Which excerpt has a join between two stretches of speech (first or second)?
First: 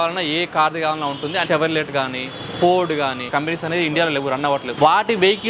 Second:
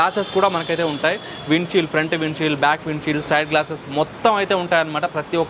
first